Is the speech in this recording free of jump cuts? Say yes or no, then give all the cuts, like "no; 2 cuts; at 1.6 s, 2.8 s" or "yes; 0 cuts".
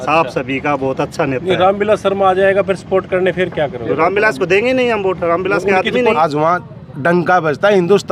no; 1 cut; at 6.2 s